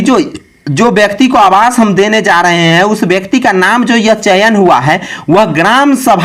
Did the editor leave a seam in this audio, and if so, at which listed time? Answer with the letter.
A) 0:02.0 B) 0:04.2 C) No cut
C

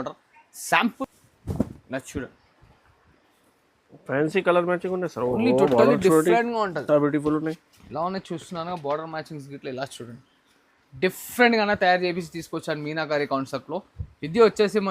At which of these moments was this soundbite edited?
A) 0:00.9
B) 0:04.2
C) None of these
A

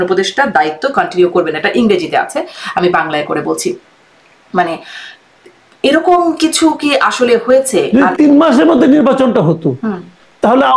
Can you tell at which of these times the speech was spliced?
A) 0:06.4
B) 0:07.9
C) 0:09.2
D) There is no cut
B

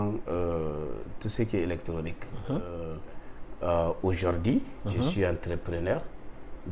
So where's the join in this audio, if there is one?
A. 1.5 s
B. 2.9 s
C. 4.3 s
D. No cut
B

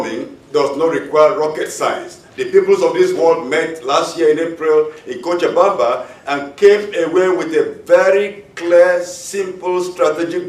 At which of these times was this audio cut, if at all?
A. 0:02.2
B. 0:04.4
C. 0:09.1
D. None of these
B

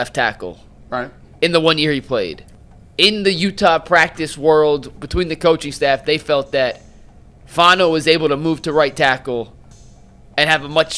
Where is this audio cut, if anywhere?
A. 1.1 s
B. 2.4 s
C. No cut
B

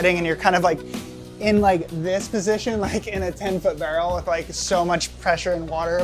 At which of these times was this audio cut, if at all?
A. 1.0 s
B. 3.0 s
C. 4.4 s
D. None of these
D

